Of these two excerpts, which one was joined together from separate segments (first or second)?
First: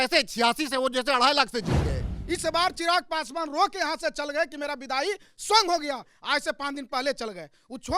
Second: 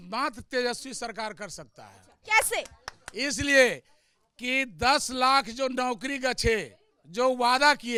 first